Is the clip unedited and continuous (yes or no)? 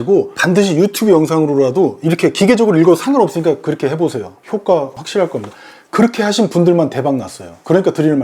yes